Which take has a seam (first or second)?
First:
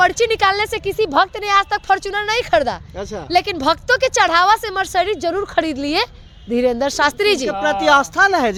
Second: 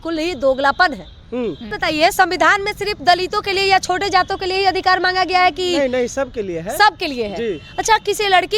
second